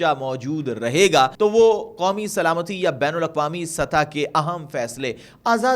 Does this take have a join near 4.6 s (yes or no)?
no